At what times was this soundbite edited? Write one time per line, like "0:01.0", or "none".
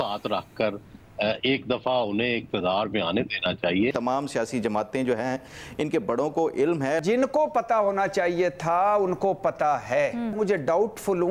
0:03.9
0:07.0
0:10.4